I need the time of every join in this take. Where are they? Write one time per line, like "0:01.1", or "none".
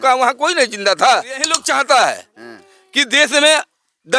0:01.6